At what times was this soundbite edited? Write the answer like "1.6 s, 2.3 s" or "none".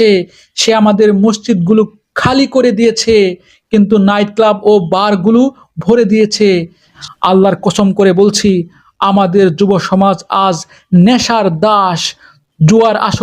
6.9 s